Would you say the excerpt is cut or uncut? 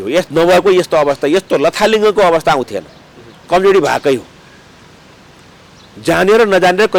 uncut